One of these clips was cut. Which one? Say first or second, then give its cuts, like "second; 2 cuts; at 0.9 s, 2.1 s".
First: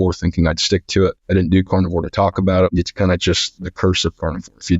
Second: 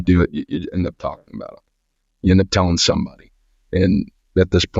first; 2 cuts; at 1.2 s, 3.2 s